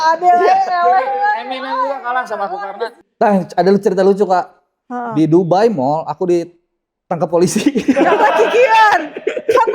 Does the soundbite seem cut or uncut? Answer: cut